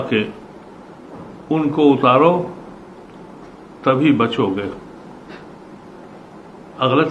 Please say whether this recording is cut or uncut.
uncut